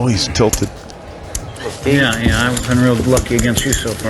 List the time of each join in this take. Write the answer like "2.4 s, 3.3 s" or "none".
1.7 s